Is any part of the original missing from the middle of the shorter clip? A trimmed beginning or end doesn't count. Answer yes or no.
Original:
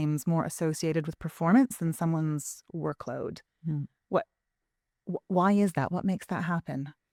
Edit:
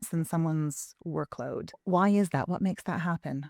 yes